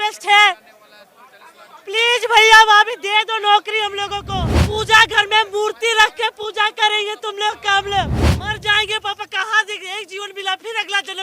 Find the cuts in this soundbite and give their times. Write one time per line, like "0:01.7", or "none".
0:04.6
0:08.3